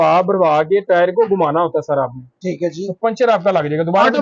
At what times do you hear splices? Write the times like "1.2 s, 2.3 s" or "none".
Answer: none